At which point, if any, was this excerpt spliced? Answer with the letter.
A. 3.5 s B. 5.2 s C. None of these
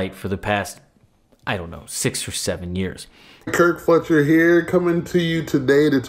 A